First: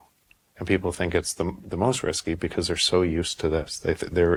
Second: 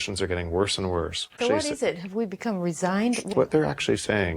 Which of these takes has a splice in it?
second; 2 cuts; at 1.4 s, 3.3 s

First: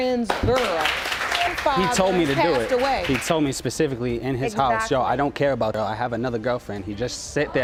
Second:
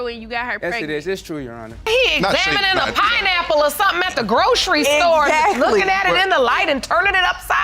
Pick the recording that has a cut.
second; 1 cut; at 1.8 s

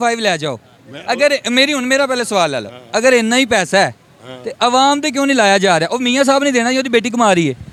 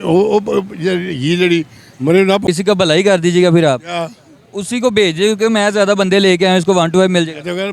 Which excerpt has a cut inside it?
second; 1 cut; at 2.4 s

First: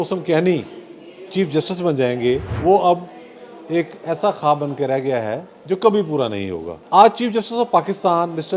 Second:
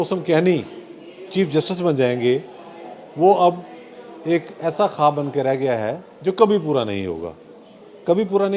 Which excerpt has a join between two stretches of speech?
first; 2 cuts; at 2.5 s, 6.7 s

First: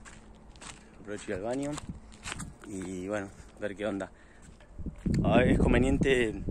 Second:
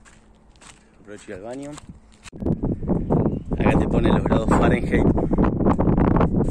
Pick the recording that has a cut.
second; 1 cut; at 2.3 s

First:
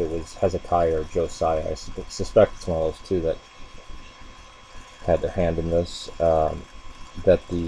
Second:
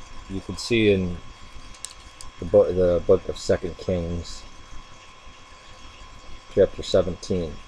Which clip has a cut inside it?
first; 1 cut; at 5.6 s

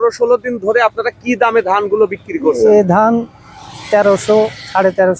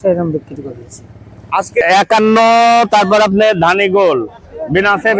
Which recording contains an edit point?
second; 1 cut; at 1.8 s

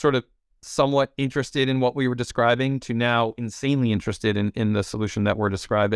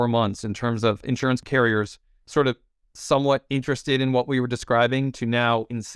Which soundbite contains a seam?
second; 1 cut; at 1.4 s

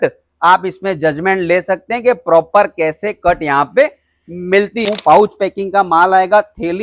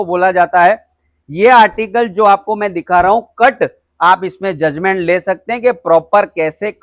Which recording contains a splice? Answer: first; 1 cut; at 4.9 s

